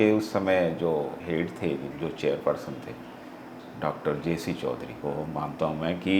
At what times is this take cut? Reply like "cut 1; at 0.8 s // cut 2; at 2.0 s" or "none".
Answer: cut 1; at 1.2 s // cut 2; at 4.9 s

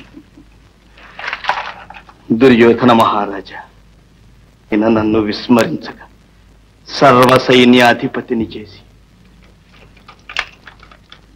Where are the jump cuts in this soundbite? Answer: cut 1; at 4.7 s

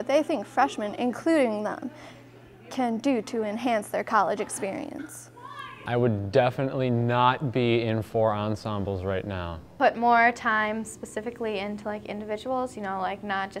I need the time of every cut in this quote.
none

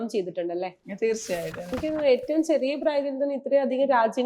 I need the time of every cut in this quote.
cut 1; at 1.7 s

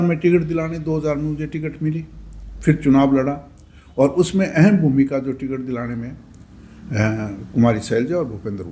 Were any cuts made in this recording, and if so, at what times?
none

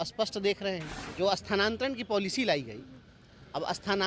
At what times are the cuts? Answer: cut 1; at 1.0 s

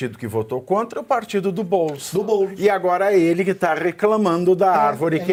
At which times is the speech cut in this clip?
none

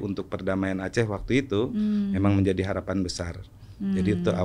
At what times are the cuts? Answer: none

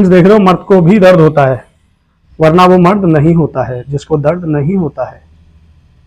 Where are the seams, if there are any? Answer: none

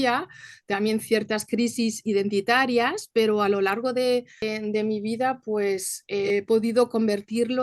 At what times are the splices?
cut 1; at 4.4 s // cut 2; at 6.3 s

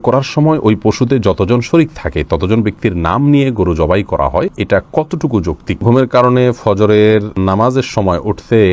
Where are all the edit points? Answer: cut 1; at 4.6 s // cut 2; at 5.8 s // cut 3; at 7.3 s

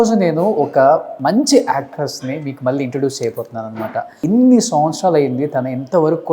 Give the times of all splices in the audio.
cut 1; at 1.1 s // cut 2; at 4.1 s

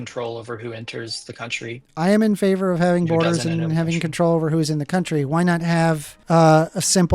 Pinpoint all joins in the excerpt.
cut 1; at 6.1 s

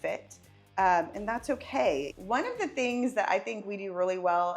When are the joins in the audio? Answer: cut 1; at 2.1 s

